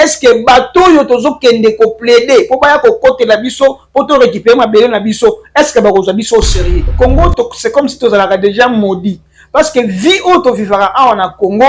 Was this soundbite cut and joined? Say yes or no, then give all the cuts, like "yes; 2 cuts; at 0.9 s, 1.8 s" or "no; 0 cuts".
yes; 1 cut; at 6.9 s